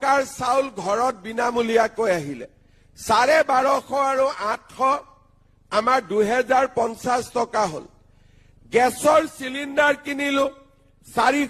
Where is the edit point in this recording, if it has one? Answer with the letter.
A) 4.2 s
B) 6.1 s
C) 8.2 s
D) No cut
B